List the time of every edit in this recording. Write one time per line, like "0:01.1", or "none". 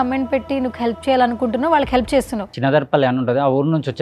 0:02.5